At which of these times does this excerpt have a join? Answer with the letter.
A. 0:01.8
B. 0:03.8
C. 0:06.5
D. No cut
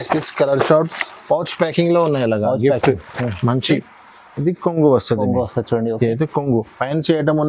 B